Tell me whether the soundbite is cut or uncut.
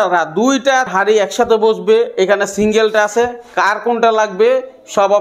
cut